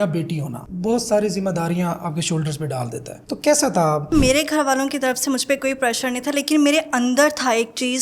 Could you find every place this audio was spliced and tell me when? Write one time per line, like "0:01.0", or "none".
0:03.2
0:04.1